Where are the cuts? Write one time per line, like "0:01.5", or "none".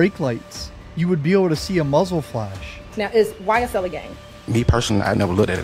0:02.8